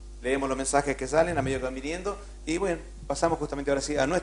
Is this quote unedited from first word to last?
yes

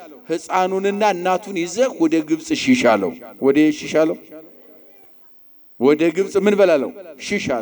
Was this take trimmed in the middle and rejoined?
no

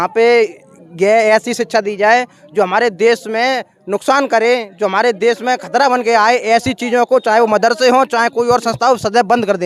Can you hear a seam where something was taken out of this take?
no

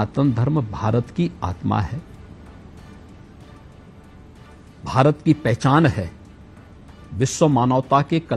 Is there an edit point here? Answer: no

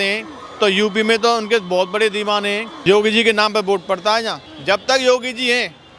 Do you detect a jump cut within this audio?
yes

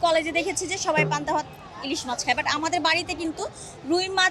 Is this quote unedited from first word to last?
yes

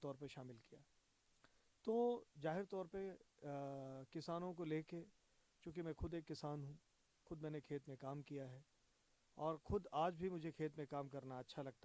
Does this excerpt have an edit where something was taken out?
no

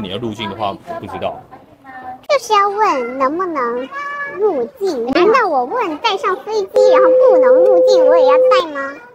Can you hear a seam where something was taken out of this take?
no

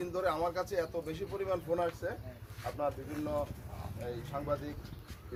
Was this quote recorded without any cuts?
yes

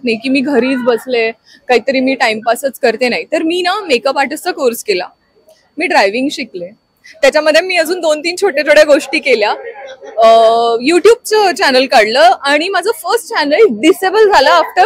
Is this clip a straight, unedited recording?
yes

